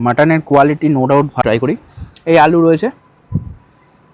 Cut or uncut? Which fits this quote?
cut